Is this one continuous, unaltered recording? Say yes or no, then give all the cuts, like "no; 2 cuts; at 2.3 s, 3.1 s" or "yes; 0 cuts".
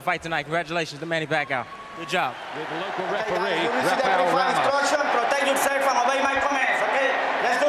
yes; 0 cuts